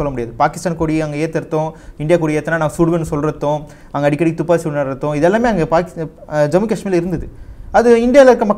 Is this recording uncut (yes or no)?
yes